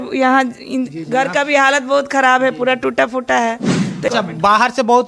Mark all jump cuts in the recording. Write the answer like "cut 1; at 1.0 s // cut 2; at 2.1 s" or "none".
cut 1; at 4.1 s